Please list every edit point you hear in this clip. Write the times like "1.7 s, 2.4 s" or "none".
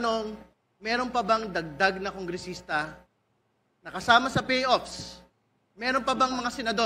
none